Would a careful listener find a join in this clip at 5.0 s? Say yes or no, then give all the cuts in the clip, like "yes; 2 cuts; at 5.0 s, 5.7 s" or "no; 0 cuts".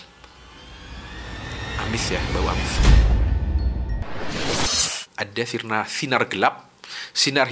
yes; 2 cuts; at 2.6 s, 5.0 s